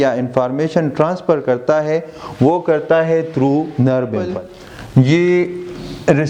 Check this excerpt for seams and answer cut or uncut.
cut